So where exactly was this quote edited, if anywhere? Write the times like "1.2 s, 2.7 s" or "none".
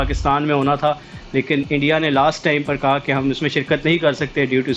none